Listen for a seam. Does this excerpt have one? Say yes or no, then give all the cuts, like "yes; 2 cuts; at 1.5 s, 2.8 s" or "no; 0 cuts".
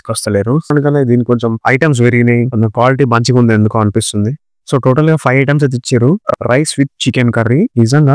yes; 2 cuts; at 0.7 s, 6.3 s